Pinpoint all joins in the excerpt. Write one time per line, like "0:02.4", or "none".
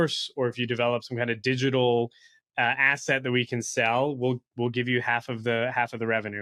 none